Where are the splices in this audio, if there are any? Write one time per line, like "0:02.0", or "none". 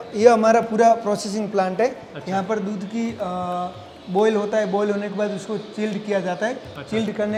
none